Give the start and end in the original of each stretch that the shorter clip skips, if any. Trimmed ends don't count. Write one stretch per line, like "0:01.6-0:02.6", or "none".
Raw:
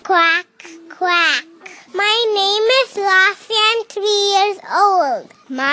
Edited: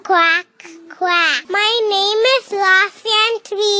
0:01.4-0:01.8